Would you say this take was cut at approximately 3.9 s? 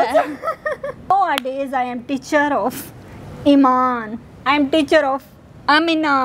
no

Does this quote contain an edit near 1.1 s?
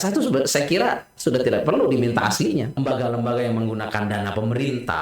no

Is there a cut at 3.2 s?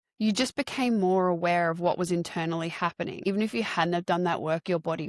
yes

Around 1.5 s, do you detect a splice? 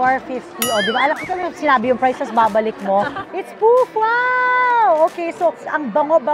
no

